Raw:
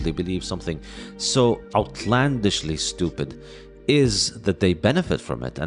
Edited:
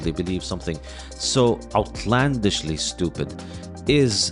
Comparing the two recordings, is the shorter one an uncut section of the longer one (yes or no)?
yes